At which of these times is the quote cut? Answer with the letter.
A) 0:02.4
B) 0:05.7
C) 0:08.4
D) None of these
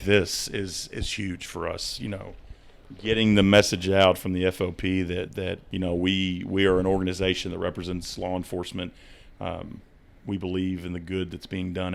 B